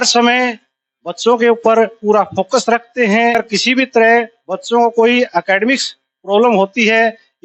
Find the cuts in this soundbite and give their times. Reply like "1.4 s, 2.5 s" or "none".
3.3 s